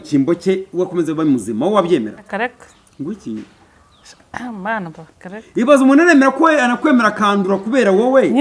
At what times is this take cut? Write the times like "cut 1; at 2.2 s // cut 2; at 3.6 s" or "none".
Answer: none